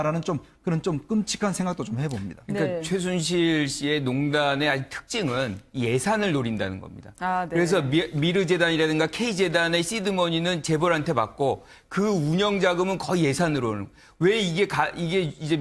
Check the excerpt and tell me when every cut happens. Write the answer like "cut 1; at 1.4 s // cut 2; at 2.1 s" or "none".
none